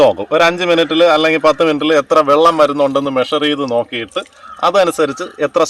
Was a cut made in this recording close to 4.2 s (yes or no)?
no